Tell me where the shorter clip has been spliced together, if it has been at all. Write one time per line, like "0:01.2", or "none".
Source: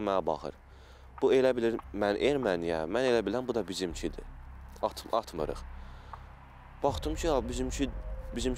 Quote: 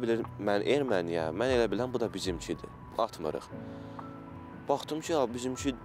0:02.9